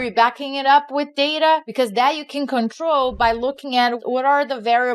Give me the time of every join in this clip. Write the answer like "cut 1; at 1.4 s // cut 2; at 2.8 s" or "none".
cut 1; at 1.7 s // cut 2; at 4.0 s